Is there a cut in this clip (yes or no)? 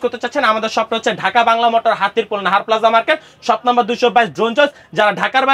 no